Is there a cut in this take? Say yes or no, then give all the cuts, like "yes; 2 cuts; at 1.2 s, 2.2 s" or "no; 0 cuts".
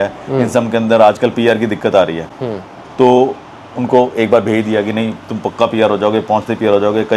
no; 0 cuts